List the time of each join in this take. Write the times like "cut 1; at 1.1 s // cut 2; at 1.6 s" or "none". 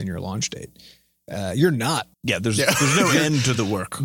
cut 1; at 2.1 s